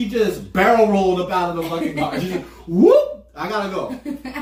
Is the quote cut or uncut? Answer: uncut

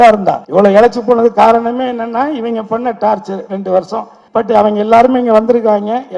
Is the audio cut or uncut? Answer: uncut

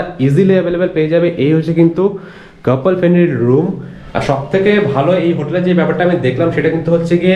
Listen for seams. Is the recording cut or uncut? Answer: uncut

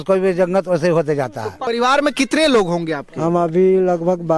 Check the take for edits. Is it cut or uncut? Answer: cut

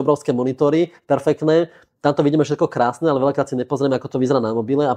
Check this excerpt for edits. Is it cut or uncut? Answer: uncut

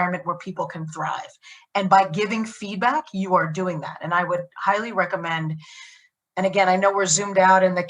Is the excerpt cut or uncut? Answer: uncut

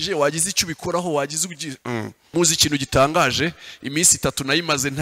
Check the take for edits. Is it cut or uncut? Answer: cut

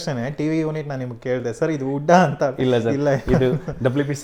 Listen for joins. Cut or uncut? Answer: uncut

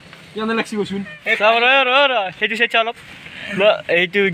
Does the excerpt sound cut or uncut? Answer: cut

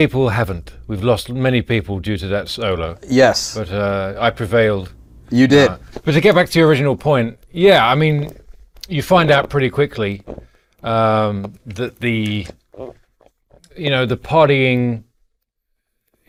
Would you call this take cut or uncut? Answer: uncut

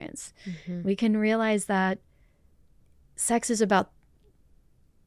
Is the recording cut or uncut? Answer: uncut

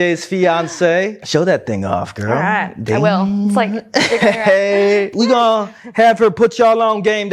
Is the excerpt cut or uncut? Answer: cut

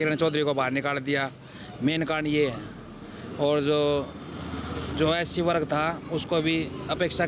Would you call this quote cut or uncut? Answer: uncut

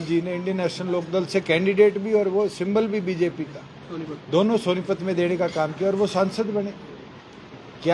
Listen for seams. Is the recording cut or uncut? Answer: uncut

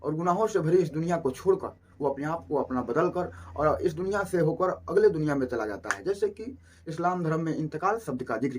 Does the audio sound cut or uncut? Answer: uncut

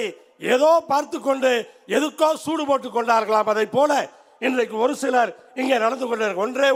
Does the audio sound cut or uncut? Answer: uncut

